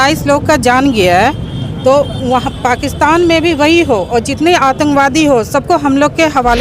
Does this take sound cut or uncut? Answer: uncut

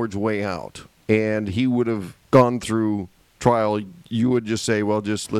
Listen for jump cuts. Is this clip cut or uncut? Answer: cut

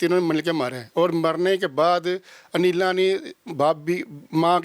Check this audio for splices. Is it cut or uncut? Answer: uncut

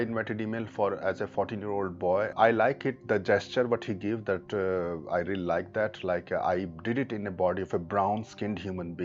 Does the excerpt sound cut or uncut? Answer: cut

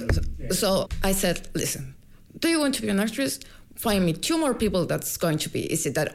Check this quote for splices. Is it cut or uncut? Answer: cut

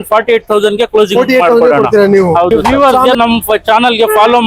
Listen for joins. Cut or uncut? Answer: cut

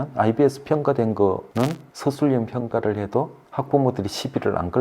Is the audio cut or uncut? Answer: cut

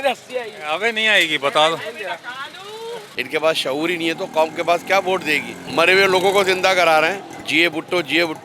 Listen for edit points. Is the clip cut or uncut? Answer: cut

